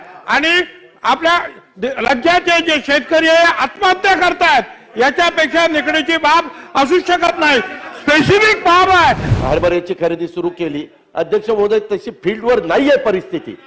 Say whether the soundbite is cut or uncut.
cut